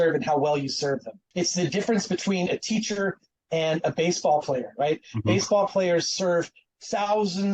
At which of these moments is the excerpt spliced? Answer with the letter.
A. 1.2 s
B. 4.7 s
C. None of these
A